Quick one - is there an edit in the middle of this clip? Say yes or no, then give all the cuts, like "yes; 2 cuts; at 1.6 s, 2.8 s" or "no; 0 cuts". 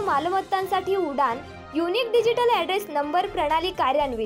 no; 0 cuts